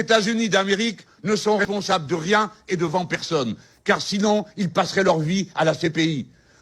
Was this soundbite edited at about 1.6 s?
yes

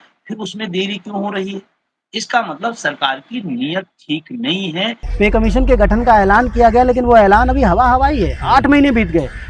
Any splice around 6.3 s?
no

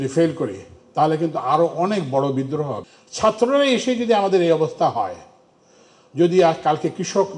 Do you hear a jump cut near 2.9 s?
yes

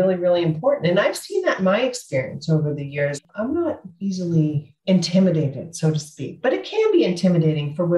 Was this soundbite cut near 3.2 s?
yes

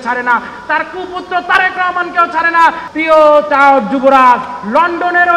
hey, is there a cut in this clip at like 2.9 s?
yes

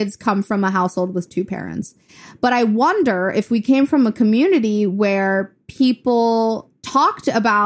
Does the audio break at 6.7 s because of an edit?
yes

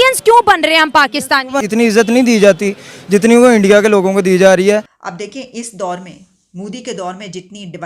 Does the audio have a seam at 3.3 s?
no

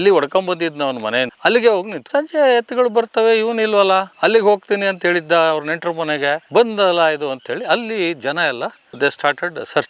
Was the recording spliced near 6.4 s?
yes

